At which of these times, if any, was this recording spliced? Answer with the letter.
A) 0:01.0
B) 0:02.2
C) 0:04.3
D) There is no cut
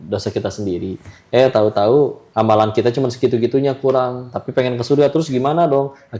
B